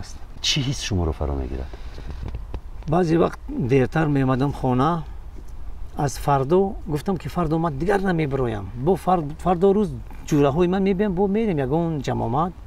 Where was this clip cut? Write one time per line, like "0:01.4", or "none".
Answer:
none